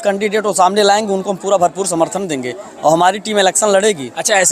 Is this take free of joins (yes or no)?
yes